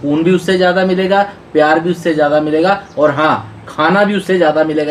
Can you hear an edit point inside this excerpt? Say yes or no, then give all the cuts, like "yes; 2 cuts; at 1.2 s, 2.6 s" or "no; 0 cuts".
no; 0 cuts